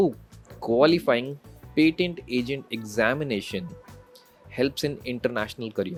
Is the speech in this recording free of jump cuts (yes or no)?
yes